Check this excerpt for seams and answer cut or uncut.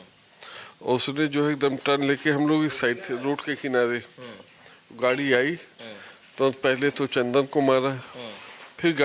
uncut